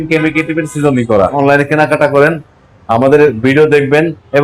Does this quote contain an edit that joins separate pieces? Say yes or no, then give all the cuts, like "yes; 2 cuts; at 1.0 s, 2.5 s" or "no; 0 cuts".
yes; 1 cut; at 1.4 s